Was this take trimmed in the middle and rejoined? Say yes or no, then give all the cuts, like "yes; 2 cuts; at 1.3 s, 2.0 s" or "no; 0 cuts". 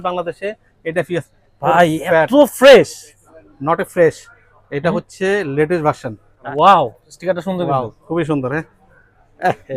yes; 1 cut; at 6.4 s